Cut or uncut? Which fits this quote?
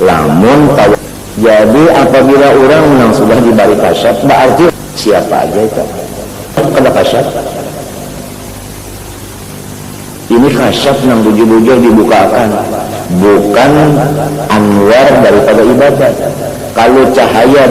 cut